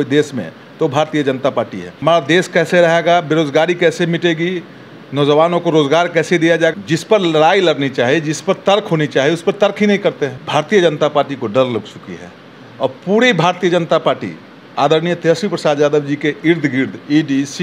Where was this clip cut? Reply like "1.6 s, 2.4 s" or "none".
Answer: 1.8 s, 6.8 s, 10.4 s